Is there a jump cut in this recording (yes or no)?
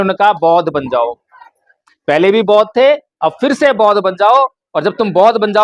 no